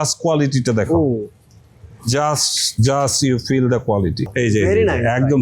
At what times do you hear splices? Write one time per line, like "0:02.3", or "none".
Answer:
0:04.3